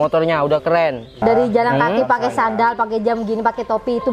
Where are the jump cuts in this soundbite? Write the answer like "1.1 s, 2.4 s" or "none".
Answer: 1.2 s

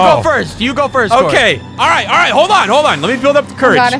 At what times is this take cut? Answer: none

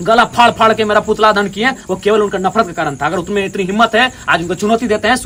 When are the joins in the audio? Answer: none

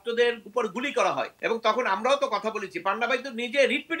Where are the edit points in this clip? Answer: 1.3 s

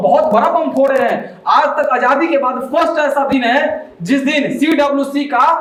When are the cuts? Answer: none

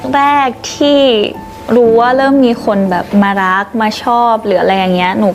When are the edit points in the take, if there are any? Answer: none

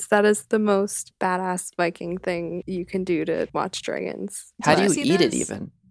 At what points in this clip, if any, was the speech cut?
1.0 s, 2.6 s, 3.5 s

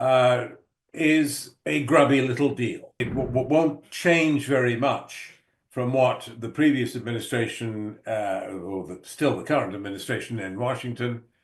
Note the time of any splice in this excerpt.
3.0 s

